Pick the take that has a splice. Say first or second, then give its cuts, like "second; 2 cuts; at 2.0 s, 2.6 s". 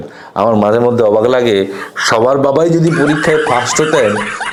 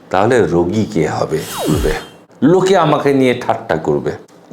second; 1 cut; at 1.7 s